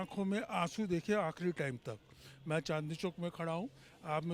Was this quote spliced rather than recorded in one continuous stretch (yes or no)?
no